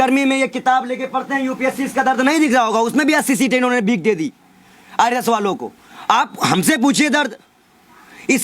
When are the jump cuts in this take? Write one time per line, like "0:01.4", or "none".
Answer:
none